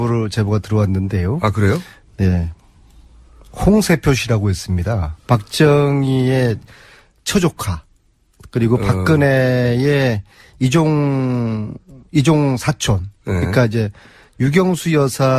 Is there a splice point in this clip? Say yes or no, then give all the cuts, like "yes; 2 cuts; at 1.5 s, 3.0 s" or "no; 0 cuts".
no; 0 cuts